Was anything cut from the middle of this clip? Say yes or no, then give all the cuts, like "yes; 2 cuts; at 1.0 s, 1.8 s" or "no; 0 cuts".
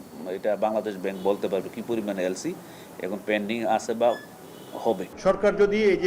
yes; 1 cut; at 5.1 s